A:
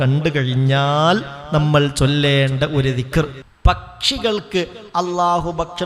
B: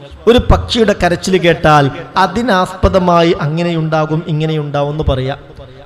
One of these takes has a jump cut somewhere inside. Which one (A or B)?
A